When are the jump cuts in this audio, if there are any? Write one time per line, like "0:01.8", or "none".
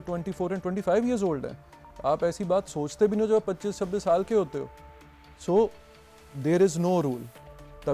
none